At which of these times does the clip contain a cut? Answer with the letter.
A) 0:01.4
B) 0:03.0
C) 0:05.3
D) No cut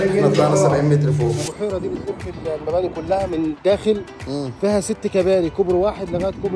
A